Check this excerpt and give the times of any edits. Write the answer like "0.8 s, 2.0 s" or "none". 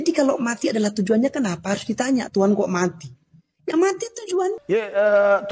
4.6 s

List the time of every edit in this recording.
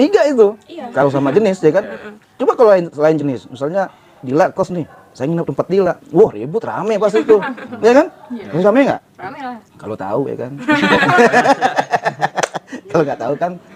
none

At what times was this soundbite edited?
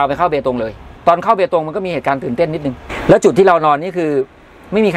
0.9 s, 2.9 s

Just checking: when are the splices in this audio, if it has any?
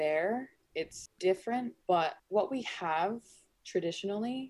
1.0 s

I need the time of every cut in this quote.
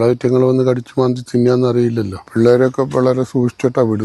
2.2 s

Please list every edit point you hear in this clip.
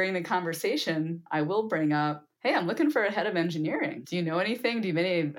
1.2 s, 2.3 s, 4.0 s

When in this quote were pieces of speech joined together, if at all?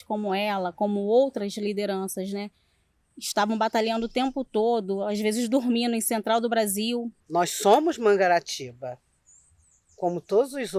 7.1 s

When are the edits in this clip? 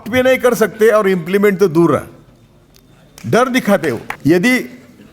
4.1 s

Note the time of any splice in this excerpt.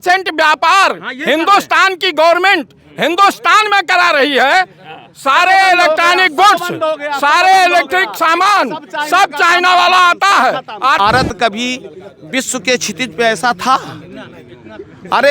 11.0 s

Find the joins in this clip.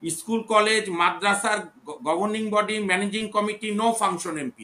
none

